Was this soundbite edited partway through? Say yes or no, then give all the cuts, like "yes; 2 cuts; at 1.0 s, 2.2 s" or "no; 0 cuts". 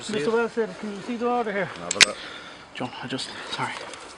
yes; 1 cut; at 1.3 s